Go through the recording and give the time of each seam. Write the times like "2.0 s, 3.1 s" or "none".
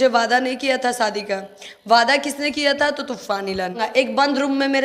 3.8 s